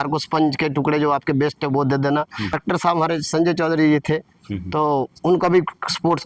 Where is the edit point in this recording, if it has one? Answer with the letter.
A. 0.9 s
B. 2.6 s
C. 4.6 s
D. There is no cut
B